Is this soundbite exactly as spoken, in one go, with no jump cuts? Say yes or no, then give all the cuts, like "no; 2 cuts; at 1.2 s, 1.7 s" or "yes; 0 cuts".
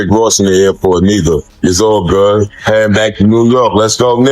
no; 2 cuts; at 1.5 s, 2.6 s